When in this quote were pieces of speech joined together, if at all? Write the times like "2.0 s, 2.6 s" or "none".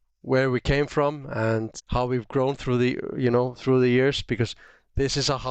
1.8 s